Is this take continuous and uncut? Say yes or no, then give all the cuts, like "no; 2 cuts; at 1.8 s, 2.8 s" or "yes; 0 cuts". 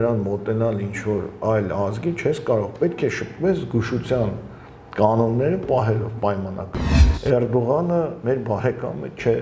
no; 1 cut; at 7.1 s